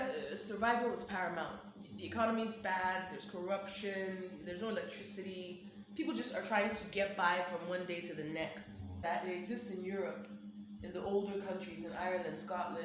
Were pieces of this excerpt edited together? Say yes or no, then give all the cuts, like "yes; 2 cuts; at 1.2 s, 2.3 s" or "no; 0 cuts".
yes; 1 cut; at 9.0 s